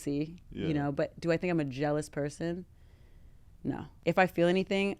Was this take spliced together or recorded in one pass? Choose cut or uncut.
cut